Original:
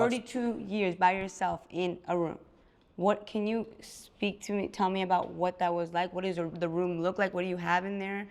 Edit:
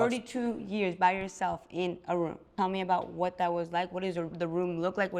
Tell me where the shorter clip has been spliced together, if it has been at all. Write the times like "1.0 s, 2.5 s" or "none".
2.5 s